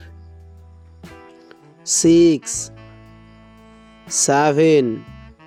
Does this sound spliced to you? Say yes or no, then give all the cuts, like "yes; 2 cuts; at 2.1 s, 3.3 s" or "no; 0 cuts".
no; 0 cuts